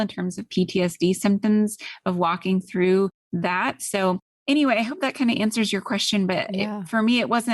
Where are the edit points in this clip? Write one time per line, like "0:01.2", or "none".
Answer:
0:03.2